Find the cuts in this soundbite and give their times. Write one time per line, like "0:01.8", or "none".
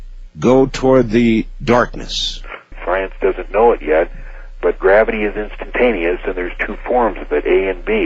0:02.7